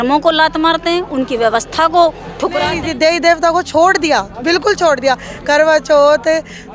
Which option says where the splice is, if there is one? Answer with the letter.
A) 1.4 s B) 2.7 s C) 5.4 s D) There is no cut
B